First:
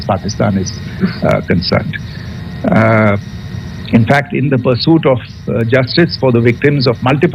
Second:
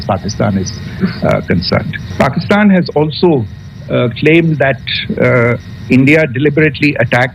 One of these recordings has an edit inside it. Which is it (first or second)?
second